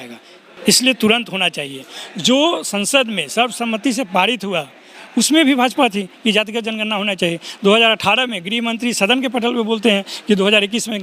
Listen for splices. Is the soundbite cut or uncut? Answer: uncut